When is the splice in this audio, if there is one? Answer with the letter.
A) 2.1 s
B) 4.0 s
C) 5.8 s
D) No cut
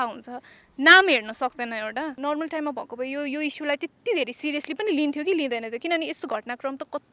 A